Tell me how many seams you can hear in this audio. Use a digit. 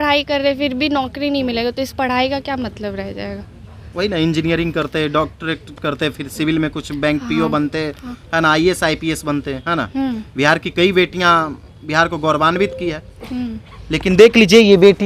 0